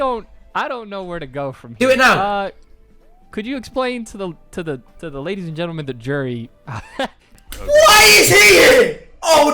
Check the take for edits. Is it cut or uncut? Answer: cut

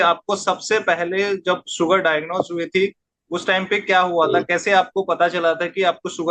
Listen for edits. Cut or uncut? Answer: uncut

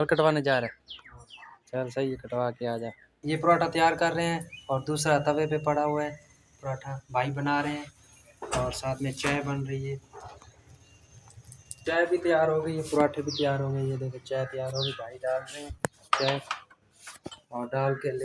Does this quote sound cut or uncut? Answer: cut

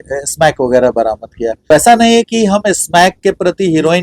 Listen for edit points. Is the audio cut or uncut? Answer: cut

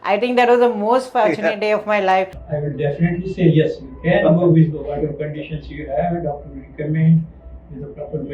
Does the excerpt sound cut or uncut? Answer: cut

